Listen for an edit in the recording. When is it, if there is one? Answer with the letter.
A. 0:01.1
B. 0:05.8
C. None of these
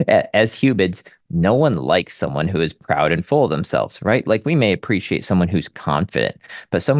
C